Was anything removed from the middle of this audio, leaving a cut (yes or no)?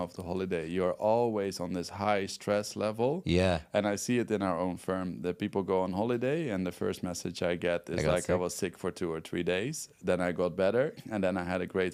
no